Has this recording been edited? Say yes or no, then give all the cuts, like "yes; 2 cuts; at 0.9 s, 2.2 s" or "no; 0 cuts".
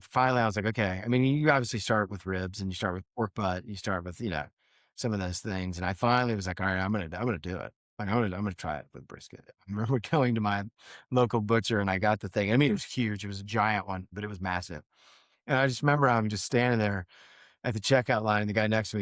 yes; 1 cut; at 14.1 s